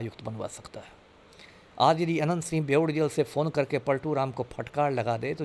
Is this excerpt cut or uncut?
uncut